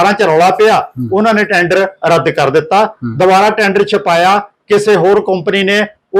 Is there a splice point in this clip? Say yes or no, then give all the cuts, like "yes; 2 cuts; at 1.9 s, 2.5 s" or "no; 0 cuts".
no; 0 cuts